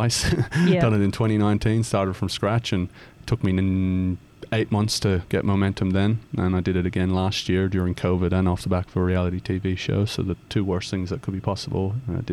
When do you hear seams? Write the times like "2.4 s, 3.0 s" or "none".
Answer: none